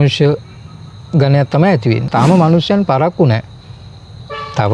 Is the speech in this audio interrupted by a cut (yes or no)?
yes